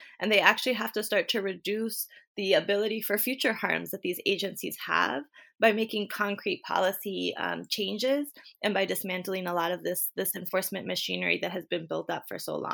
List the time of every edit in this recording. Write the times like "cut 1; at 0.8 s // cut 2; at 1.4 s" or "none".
none